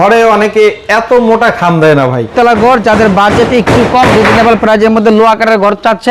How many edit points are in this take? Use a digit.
1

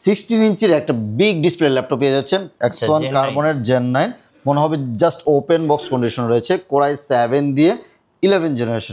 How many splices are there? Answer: 1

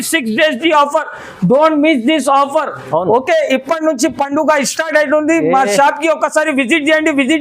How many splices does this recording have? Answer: 0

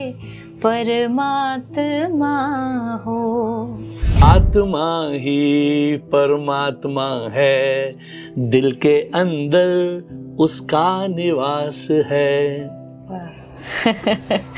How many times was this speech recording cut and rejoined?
1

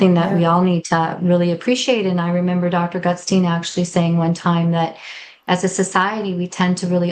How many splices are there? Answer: 0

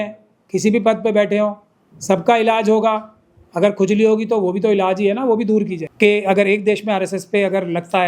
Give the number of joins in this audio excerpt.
1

